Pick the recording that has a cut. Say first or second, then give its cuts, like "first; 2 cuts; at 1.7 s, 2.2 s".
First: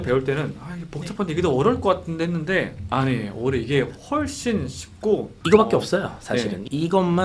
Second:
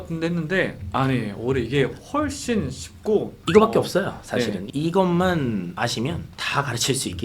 second; 1 cut; at 6.3 s